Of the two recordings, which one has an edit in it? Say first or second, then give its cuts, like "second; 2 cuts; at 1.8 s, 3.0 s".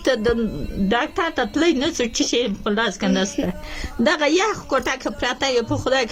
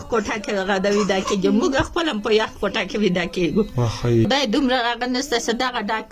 second; 1 cut; at 4.3 s